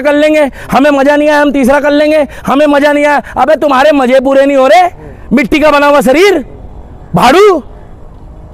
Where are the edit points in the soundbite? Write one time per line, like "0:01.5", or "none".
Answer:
none